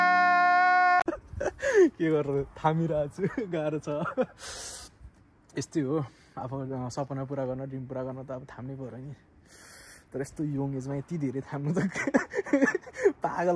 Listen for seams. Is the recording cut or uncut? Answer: cut